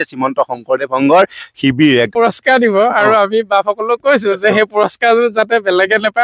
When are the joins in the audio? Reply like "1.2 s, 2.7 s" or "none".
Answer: 2.1 s